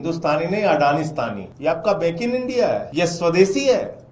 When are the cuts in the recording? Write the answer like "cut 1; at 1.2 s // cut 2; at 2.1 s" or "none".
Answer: cut 1; at 1.5 s // cut 2; at 2.9 s